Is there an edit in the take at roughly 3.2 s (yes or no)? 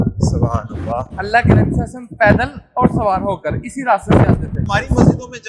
no